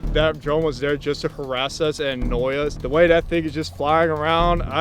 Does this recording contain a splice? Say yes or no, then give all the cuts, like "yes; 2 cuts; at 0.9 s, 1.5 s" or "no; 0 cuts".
yes; 1 cut; at 2.8 s